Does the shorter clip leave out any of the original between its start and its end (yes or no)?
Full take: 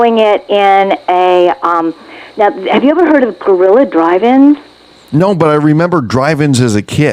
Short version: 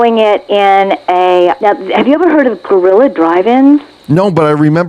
yes